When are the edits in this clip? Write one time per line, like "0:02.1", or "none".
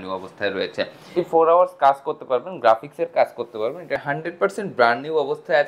0:01.0
0:04.0